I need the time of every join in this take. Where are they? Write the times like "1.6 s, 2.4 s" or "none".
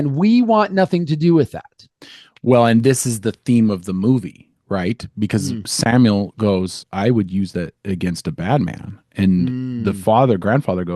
6.8 s

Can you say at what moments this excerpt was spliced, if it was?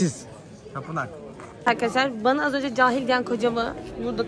1.5 s

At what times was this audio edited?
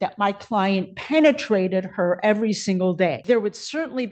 3.2 s

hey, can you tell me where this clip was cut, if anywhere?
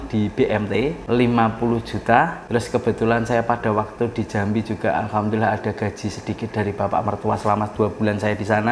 1.0 s, 2.4 s

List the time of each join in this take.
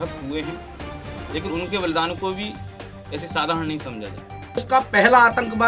4.6 s

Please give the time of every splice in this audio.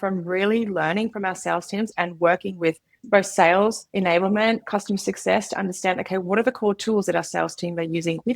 2.9 s, 3.8 s

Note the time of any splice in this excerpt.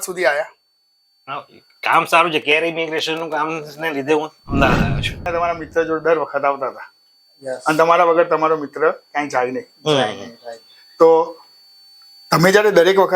5.3 s

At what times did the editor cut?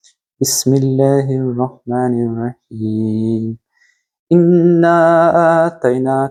none

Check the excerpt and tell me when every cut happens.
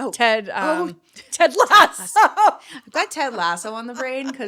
none

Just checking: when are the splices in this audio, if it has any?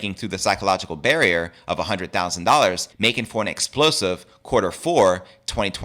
2.9 s

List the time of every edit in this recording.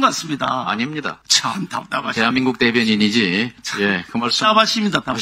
1.2 s, 3.6 s

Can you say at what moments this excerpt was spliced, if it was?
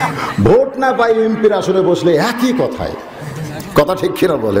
none

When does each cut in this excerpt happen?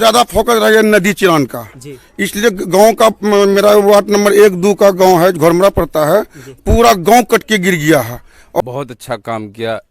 8.6 s

